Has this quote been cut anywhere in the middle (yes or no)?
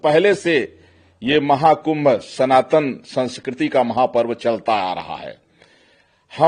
no